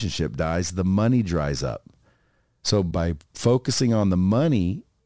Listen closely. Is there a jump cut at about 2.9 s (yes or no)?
yes